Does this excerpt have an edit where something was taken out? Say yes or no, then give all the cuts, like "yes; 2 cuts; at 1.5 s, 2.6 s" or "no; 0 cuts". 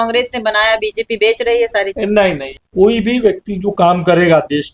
yes; 1 cut; at 2.5 s